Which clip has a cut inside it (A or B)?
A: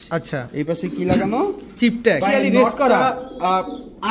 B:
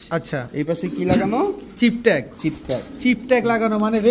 A